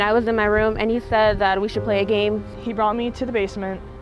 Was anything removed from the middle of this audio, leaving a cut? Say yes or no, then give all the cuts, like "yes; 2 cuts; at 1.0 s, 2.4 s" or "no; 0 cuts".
yes; 1 cut; at 2.5 s